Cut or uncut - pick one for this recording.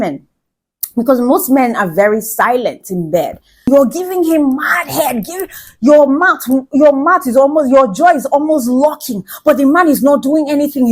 cut